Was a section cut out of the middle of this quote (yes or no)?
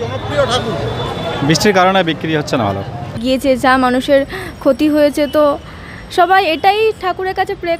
yes